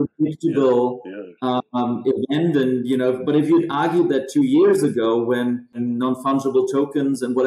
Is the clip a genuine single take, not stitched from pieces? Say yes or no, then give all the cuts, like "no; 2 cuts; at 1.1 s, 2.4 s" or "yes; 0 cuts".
no; 1 cut; at 5.8 s